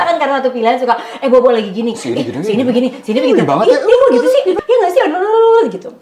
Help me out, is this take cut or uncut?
cut